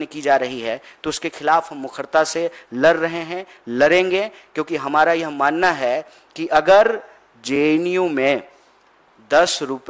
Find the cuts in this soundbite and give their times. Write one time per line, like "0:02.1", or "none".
none